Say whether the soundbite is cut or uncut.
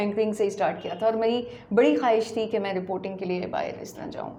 uncut